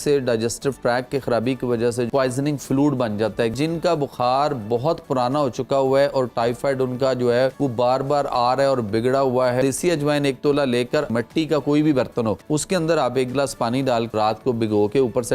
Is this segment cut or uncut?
cut